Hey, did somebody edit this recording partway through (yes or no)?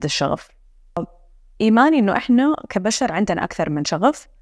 yes